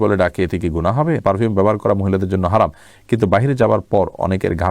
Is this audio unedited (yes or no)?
no